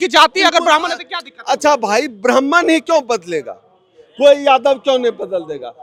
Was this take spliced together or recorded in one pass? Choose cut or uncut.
uncut